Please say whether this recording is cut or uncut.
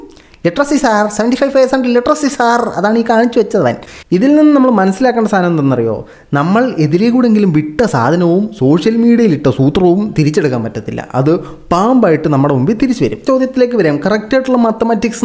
cut